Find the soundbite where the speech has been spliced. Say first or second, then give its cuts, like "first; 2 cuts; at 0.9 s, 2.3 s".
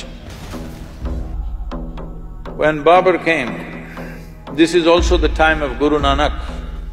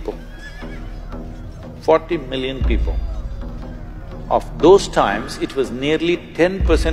first; 1 cut; at 1.4 s